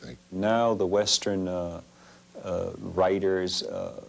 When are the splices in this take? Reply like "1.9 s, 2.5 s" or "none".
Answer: none

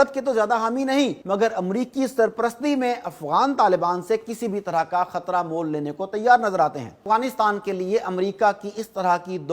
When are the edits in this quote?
1.2 s, 7.0 s

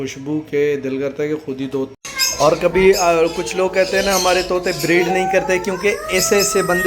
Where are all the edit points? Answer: 2.0 s

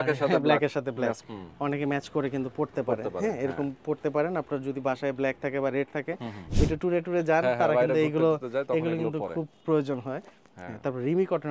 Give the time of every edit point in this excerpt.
1.2 s, 6.4 s

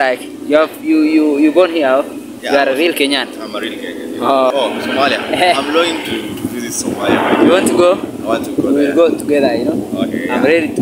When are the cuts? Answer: 4.5 s

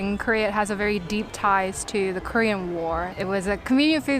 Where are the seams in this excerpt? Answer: 3.1 s

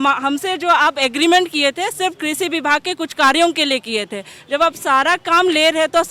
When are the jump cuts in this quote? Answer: none

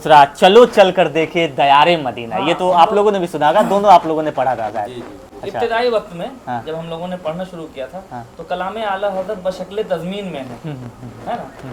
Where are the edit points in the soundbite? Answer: none

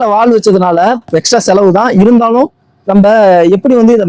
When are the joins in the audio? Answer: 1.0 s

